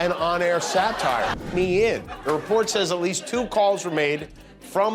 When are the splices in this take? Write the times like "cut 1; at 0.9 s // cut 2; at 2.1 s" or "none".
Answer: cut 1; at 1.4 s